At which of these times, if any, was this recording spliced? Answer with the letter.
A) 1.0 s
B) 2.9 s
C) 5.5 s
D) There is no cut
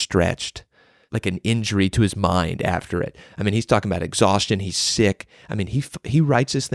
A